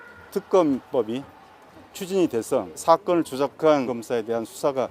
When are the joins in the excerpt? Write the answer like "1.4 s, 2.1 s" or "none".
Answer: 2.8 s, 3.9 s